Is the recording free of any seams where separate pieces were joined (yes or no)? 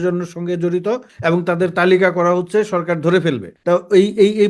no